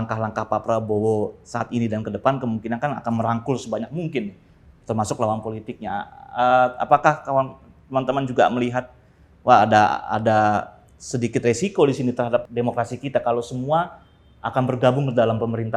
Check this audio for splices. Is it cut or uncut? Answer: uncut